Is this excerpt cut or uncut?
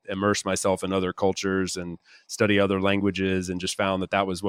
uncut